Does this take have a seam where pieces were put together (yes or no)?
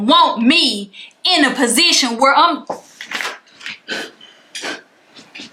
no